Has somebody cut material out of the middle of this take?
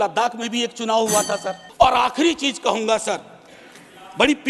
yes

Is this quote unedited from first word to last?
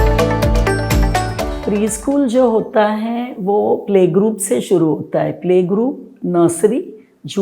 no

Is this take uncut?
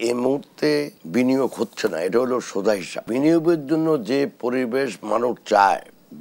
no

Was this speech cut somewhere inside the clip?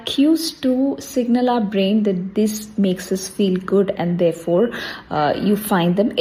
no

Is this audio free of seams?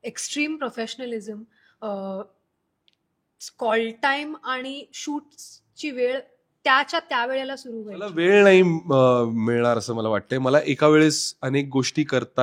no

